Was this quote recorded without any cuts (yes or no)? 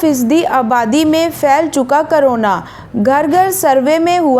yes